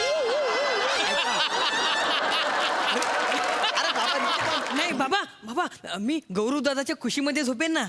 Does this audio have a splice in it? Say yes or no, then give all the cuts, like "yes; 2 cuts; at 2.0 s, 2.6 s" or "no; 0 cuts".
yes; 1 cut; at 4.7 s